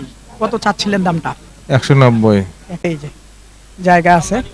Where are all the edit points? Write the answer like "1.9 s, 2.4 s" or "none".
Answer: 2.9 s